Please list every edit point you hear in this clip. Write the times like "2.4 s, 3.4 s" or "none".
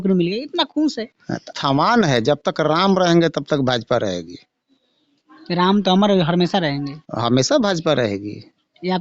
1.5 s